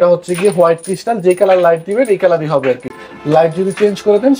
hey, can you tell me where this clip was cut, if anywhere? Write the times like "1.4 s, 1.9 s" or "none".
none